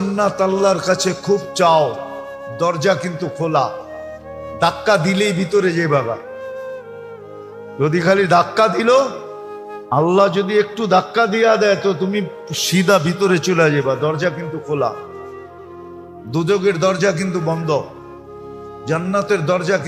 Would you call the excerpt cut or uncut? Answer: uncut